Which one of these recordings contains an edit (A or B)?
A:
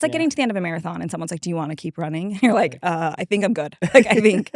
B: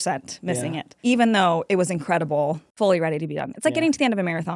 B